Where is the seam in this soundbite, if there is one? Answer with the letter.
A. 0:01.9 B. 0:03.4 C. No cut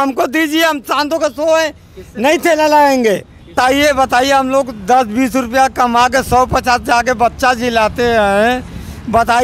B